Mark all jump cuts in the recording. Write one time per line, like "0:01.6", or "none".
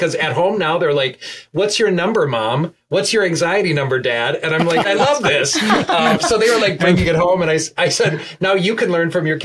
0:04.9